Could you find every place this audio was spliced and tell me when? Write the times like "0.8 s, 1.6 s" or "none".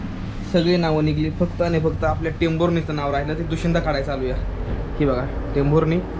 none